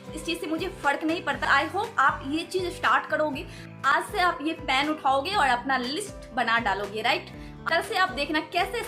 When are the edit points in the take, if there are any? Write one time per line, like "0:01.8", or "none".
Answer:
none